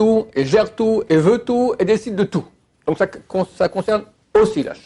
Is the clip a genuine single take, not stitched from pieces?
yes; 0 cuts

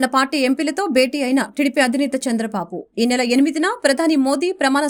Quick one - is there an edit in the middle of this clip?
no; 0 cuts

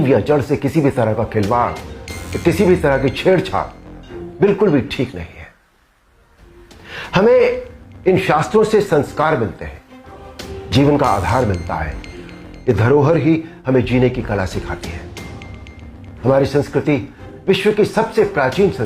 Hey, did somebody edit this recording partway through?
yes; 2 cuts; at 14.8 s, 16.2 s

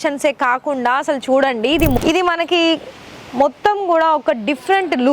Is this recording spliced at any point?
yes; 1 cut; at 2.0 s

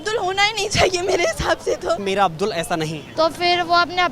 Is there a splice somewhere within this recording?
yes; 2 cuts; at 2.0 s, 3.0 s

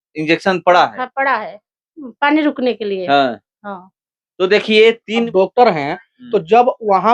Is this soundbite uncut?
no; 1 cut; at 5.3 s

